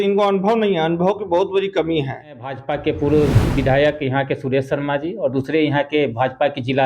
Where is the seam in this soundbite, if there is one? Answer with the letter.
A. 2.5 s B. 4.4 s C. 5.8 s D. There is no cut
A